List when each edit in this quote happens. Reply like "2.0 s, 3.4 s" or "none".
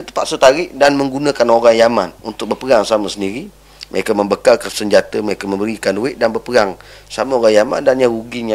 2.2 s, 4.7 s